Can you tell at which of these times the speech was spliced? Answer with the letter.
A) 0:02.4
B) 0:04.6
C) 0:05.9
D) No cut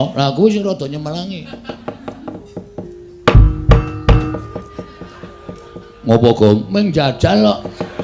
A